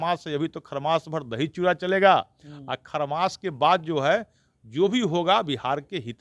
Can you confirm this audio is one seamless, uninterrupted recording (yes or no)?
yes